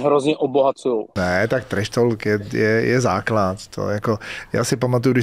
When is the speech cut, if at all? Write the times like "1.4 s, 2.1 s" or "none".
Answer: 1.2 s